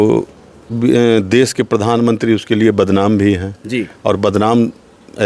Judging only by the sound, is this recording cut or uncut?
uncut